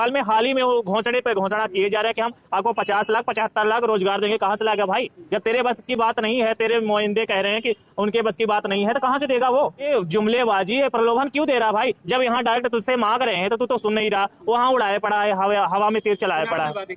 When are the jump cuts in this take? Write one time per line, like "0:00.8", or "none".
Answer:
none